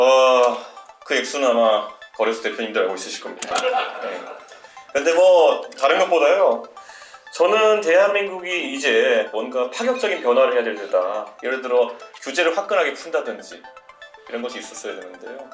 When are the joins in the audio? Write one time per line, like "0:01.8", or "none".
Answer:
0:09.3
0:11.3